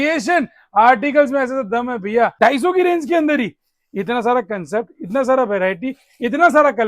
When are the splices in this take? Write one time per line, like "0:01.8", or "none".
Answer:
0:02.3